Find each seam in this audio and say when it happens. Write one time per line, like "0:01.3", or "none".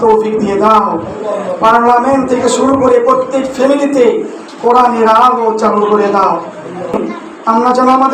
0:06.9